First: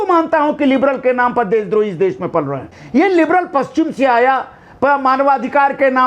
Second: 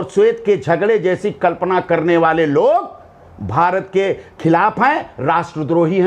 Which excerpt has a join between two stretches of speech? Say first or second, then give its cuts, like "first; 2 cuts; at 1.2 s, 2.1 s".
first; 1 cut; at 2.7 s